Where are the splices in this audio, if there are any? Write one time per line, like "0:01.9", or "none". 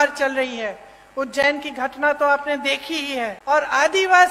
0:03.4